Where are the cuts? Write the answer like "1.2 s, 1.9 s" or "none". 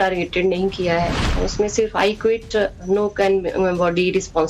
1.2 s